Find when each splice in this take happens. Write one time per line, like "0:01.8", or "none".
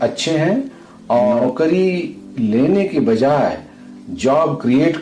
0:00.9